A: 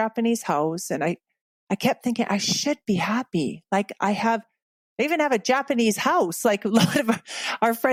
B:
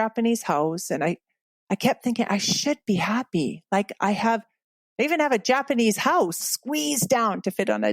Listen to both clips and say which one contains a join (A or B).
B